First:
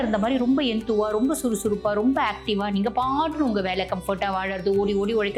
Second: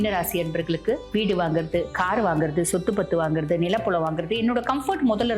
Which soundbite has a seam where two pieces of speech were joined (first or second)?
second